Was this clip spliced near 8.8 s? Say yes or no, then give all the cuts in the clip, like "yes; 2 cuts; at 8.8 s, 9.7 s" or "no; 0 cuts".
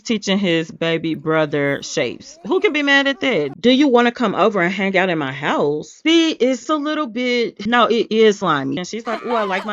yes; 2 cuts; at 3.3 s, 8.8 s